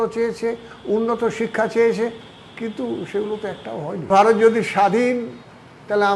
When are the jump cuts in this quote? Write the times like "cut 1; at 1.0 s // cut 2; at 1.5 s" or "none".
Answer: cut 1; at 4.1 s